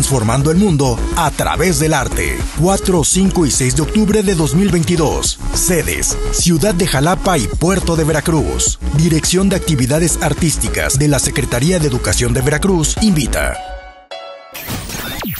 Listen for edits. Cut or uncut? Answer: cut